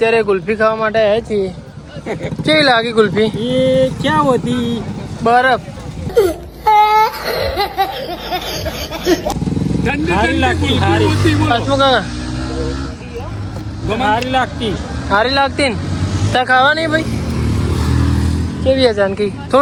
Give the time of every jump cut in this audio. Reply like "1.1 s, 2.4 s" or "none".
none